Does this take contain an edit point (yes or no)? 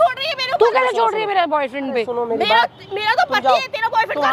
no